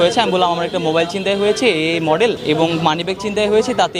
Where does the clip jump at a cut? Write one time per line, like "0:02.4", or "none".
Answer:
0:02.4